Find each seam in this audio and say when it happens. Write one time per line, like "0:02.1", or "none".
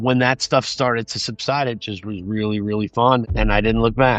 0:03.2